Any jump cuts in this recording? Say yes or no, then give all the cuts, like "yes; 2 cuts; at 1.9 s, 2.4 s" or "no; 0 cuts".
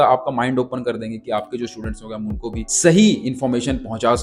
yes; 1 cut; at 2.7 s